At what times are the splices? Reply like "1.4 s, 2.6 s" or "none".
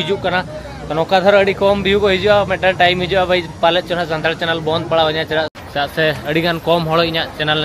5.5 s